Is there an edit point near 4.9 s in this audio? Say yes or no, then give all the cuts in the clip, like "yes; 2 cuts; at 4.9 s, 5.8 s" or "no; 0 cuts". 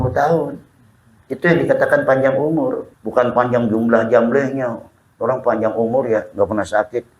no; 1 cut; at 2.9 s